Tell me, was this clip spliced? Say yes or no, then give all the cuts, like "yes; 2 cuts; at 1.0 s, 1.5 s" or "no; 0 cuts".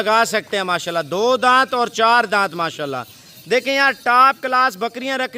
no; 0 cuts